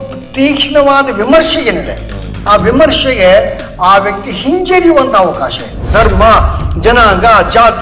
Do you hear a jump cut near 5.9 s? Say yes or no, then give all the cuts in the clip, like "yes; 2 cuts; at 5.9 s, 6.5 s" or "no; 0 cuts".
yes; 1 cut; at 5.9 s